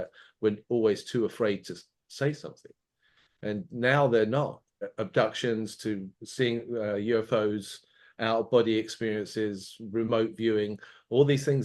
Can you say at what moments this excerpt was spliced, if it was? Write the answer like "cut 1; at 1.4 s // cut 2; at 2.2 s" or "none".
cut 1; at 4.8 s